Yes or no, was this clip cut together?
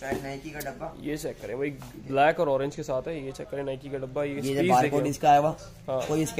no